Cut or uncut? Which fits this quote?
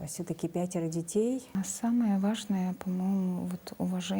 cut